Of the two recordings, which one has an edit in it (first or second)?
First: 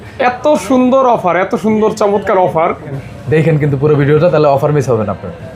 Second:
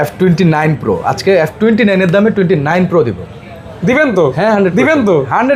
first